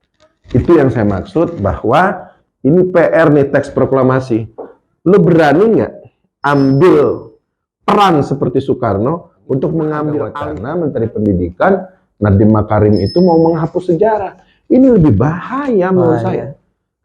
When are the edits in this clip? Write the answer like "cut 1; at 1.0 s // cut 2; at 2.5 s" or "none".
cut 1; at 10.4 s